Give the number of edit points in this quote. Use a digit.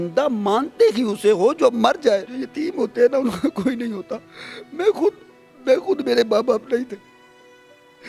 1